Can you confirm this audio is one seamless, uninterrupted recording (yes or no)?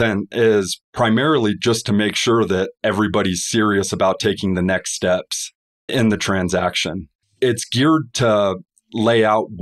no